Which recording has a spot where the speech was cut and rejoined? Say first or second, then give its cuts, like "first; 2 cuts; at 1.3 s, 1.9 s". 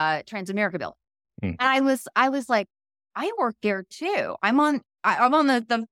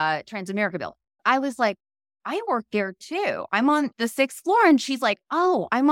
second; 2 cuts; at 1.2 s, 3.9 s